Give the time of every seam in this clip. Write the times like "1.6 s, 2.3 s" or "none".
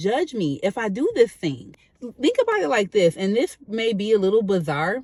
none